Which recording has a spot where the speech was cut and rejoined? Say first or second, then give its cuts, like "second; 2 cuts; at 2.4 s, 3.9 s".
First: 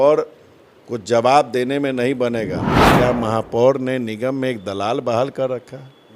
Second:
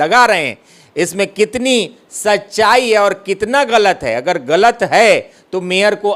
first; 1 cut; at 2.9 s